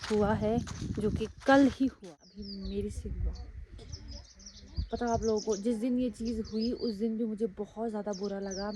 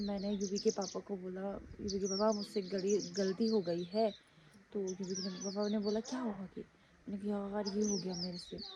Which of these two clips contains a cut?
first; 1 cut; at 2.0 s

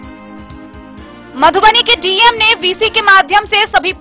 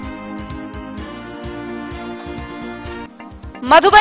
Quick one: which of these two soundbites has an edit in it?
second; 1 cut; at 1.1 s

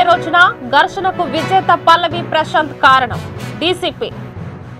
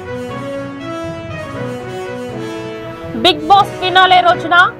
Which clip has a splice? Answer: second; 1 cut; at 2.7 s

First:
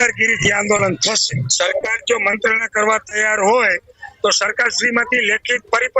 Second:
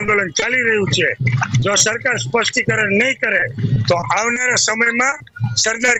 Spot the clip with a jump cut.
first; 1 cut; at 1.4 s

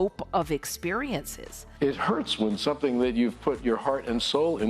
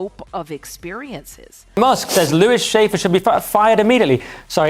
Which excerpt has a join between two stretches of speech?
first; 1 cut; at 1.5 s

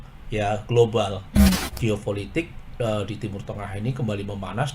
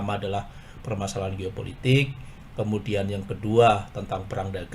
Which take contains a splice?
first; 1 cut; at 1.6 s

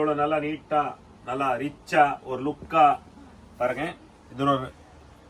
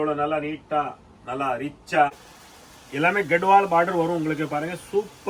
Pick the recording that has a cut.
second; 1 cut; at 2.3 s

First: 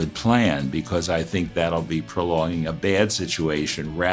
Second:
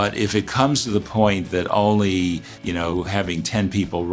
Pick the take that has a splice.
second; 1 cut; at 2.8 s

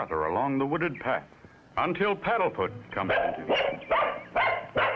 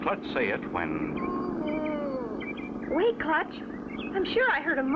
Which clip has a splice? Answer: first; 1 cut; at 2.9 s

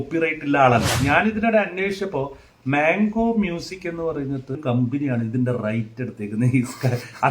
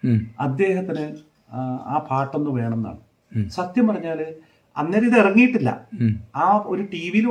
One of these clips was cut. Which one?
first; 2 cuts; at 0.9 s, 4.6 s

